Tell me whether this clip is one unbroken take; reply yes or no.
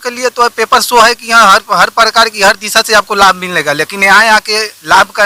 yes